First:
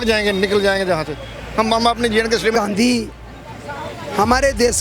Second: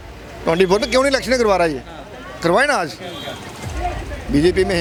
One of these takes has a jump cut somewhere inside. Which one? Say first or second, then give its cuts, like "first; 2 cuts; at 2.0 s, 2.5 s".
first; 1 cut; at 2.5 s